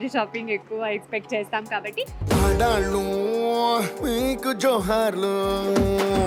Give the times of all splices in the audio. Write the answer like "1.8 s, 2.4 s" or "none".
none

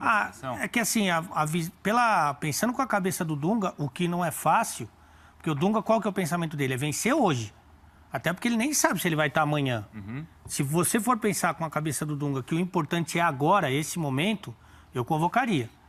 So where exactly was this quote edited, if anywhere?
none

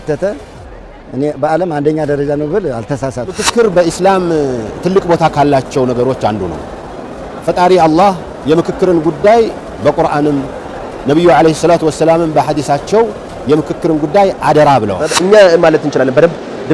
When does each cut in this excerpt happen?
3.4 s, 15.1 s

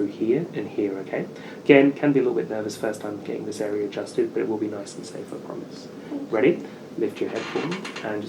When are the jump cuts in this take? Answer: none

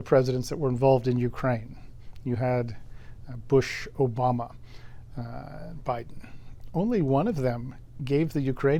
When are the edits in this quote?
none

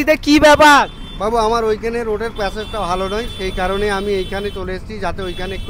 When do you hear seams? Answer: 1.0 s

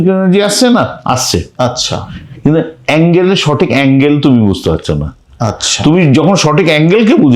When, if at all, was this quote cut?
none

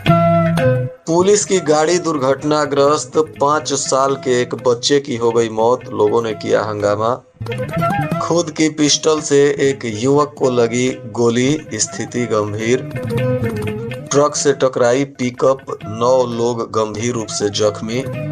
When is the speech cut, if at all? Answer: 0.9 s

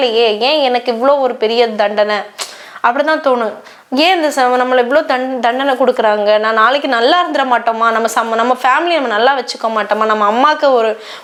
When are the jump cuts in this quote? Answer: none

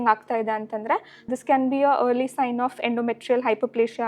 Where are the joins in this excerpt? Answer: 1.2 s

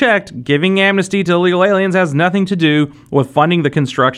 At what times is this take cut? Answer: none

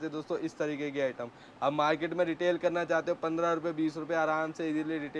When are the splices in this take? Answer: none

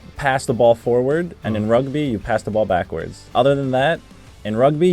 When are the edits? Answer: 3.3 s

